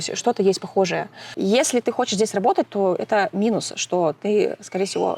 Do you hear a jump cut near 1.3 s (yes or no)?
yes